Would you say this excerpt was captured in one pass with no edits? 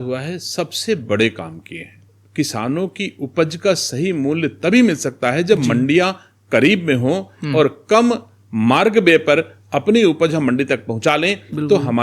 no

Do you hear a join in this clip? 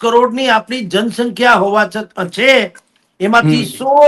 no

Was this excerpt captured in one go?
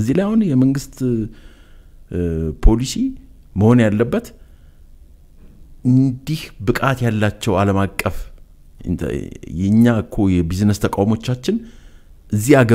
yes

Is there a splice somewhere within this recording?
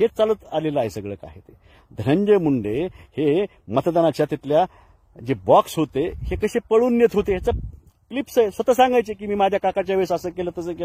no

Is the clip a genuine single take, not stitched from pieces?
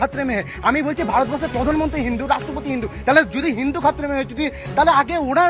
yes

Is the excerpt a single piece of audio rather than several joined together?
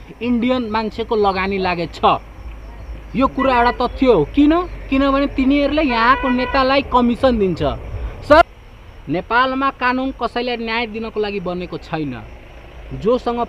no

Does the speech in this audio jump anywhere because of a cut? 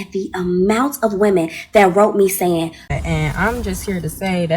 yes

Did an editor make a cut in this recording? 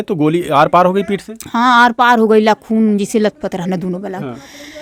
no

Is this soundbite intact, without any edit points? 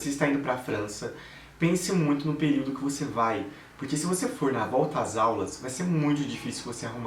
yes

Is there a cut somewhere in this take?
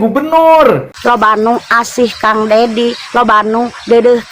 yes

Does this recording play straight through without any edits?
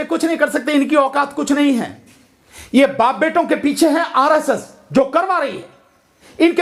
yes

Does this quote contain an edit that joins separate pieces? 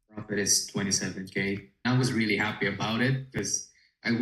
yes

